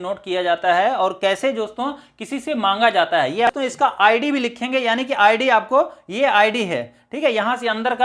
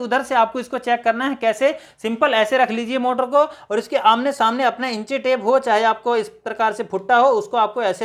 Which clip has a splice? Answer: first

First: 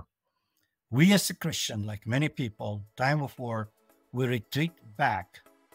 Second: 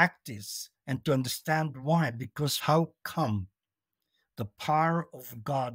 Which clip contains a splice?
second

